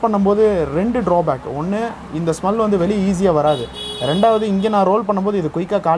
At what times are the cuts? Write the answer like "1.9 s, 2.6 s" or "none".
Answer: none